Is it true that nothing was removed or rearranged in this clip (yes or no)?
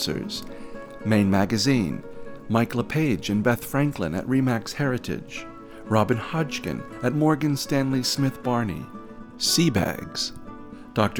yes